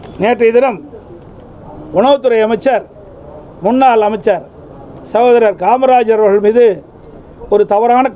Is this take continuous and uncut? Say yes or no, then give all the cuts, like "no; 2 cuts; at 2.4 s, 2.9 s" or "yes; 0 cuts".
yes; 0 cuts